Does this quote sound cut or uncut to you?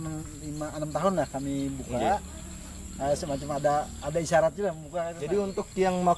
cut